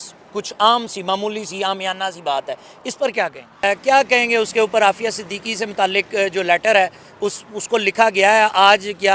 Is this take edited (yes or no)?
yes